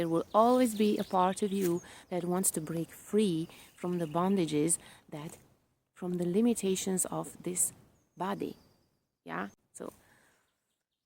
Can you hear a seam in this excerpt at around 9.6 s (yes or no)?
yes